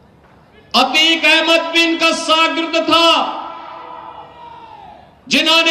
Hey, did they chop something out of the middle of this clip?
no; 0 cuts

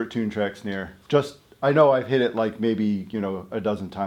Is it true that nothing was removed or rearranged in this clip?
yes; 0 cuts

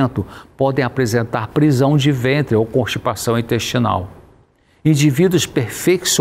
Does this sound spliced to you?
no; 0 cuts

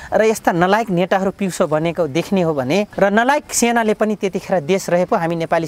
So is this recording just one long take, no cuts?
no; 1 cut; at 2.9 s

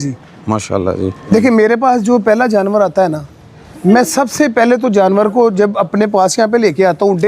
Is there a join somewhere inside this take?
yes; 1 cut; at 1.2 s

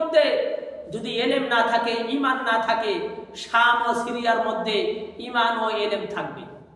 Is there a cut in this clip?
no; 0 cuts

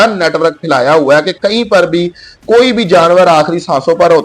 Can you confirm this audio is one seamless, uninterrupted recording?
yes; 0 cuts

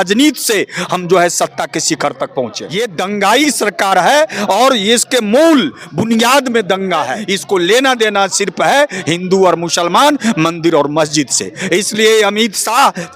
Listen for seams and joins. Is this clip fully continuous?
no; 2 cuts; at 2.6 s, 7.3 s

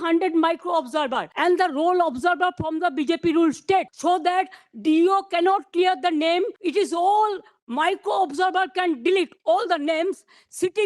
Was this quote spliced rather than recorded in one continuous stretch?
yes; 3 cuts; at 1.2 s, 3.9 s, 6.6 s

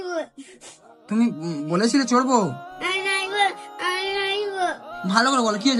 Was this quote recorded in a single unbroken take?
yes; 0 cuts

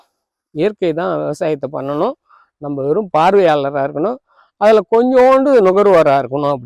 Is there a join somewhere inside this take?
no; 0 cuts

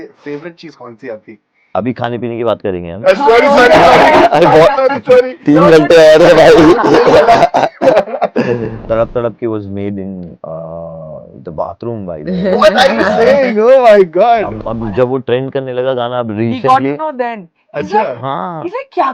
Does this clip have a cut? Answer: yes; 2 cuts; at 8.8 s, 14.6 s

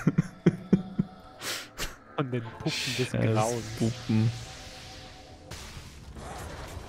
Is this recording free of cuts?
no; 1 cut; at 5.5 s

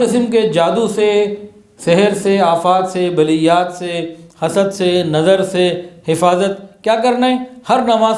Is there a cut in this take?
no; 0 cuts

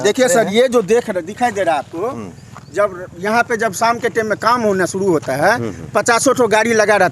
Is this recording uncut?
yes; 0 cuts

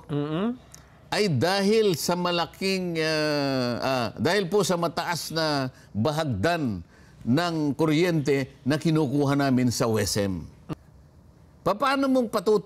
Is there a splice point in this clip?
yes; 1 cut; at 10.7 s

